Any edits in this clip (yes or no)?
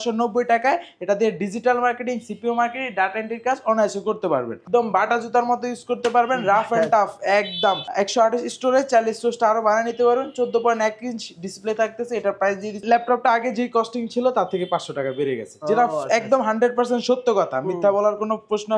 yes